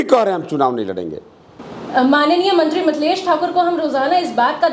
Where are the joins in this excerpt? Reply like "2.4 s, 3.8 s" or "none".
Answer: 1.7 s